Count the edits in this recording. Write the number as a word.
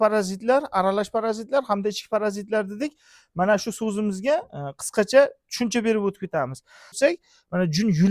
one